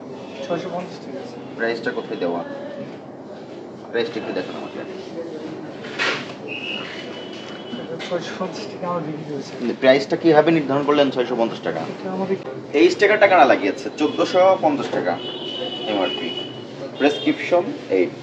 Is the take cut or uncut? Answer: cut